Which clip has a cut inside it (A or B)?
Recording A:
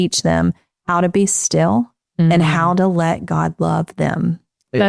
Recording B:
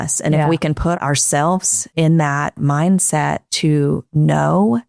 B